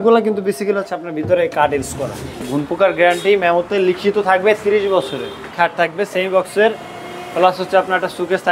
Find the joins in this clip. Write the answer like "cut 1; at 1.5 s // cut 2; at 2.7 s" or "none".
cut 1; at 2.4 s // cut 2; at 5.5 s